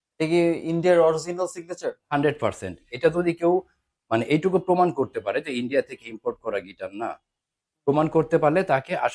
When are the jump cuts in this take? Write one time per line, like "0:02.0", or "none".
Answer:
0:02.9